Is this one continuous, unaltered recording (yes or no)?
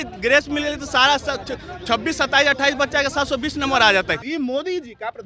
no